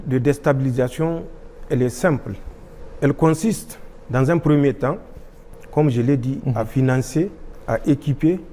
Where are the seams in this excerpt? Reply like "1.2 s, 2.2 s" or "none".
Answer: none